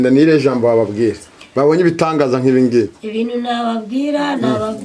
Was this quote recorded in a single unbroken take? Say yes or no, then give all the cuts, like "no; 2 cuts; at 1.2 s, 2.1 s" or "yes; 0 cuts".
yes; 0 cuts